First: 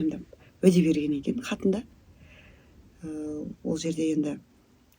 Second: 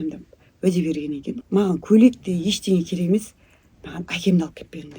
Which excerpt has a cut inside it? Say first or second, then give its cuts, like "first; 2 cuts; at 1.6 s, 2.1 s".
second; 1 cut; at 1.3 s